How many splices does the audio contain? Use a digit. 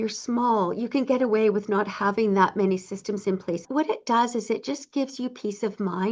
1